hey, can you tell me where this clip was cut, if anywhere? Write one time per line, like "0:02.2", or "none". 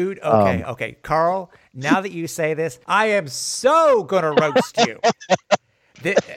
0:01.0
0:02.8